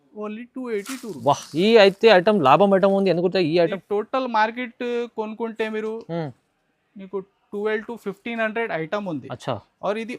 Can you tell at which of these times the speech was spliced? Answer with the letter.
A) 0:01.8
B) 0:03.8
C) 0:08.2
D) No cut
B